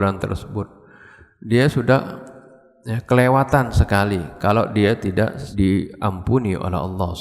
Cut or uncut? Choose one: cut